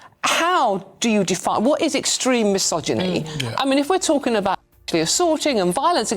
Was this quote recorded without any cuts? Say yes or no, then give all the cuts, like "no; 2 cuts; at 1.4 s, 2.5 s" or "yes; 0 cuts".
no; 1 cut; at 2.9 s